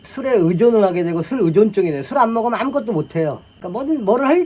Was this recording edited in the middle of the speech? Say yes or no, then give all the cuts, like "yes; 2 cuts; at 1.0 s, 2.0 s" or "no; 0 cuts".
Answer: no; 0 cuts